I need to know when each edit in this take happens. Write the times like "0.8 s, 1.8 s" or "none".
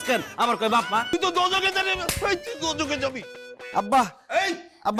1.1 s